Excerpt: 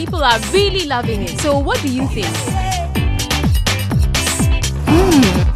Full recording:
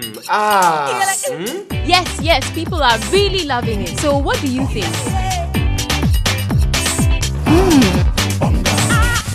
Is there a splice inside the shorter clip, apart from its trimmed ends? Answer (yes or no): no